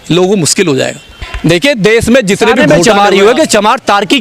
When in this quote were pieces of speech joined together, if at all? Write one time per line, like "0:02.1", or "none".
0:02.6